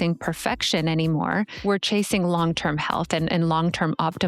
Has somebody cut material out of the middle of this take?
yes; 1 cut; at 1.6 s

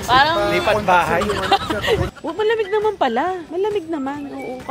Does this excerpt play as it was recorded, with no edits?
no; 2 cuts; at 2.1 s, 3.5 s

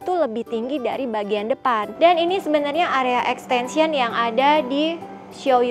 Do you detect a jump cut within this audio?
yes; 1 cut; at 1.9 s

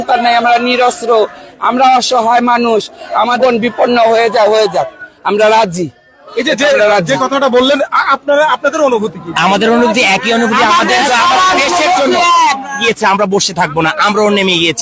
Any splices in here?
no; 0 cuts

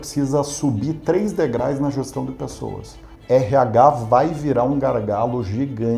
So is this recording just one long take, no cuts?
no; 1 cut; at 3.1 s

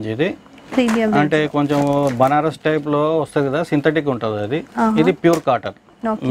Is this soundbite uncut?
yes; 0 cuts

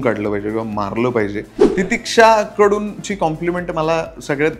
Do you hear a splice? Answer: yes; 1 cut; at 1.6 s

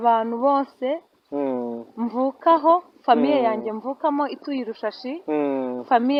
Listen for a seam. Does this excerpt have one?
no; 0 cuts

